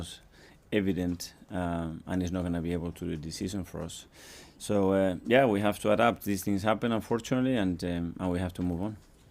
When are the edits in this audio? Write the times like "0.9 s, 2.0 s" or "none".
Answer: 2.4 s